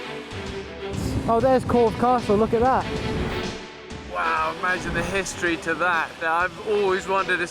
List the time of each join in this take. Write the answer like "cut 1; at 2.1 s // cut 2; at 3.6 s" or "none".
cut 1; at 6.2 s